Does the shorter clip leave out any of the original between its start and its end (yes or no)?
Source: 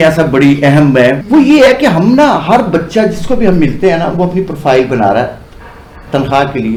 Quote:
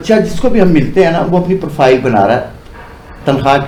no